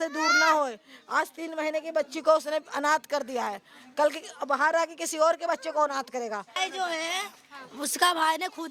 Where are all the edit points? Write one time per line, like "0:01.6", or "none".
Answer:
0:06.5